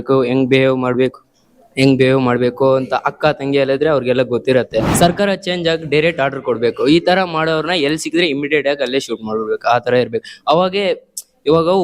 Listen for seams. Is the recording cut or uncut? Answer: cut